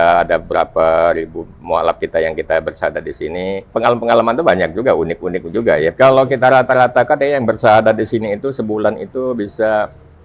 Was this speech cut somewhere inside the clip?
yes; 2 cuts; at 3.7 s, 5.9 s

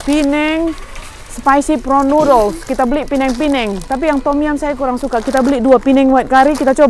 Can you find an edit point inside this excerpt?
no; 0 cuts

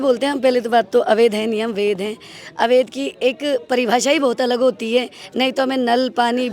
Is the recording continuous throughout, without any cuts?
yes; 0 cuts

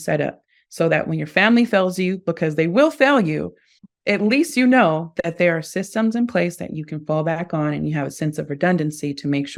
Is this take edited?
no; 0 cuts

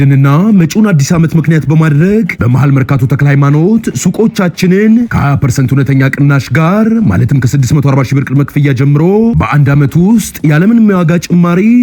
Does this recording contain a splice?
no; 0 cuts

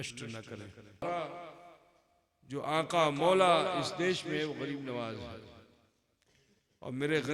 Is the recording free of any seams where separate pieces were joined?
no; 1 cut; at 1.0 s

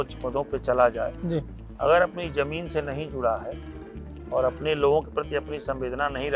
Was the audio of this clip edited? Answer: no; 0 cuts

